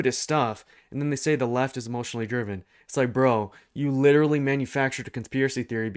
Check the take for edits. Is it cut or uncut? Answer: uncut